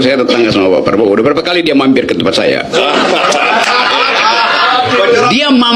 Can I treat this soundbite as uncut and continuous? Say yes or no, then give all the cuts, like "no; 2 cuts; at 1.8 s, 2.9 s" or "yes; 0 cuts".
yes; 0 cuts